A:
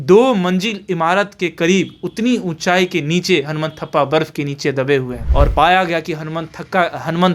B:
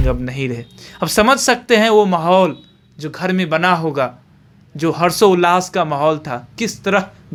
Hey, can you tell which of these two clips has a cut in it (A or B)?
A